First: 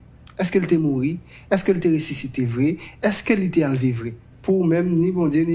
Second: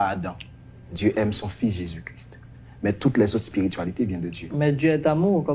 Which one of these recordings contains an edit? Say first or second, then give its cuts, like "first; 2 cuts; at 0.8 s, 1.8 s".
first; 1 cut; at 4.2 s